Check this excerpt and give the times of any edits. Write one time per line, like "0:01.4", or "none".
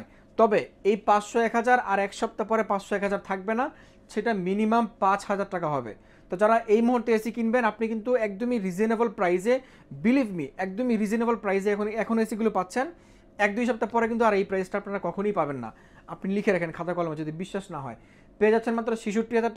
none